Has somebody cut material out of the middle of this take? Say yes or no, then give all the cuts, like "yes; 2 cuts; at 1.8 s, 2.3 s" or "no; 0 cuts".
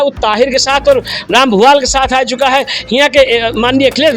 no; 0 cuts